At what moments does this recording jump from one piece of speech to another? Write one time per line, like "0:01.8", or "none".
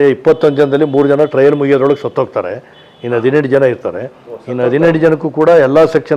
none